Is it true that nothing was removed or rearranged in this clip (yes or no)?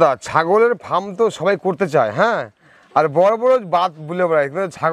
yes